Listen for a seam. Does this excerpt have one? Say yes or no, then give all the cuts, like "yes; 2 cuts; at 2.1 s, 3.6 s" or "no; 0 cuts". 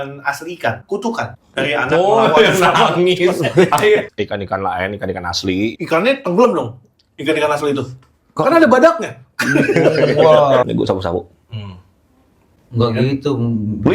yes; 3 cuts; at 4.1 s, 5.8 s, 10.6 s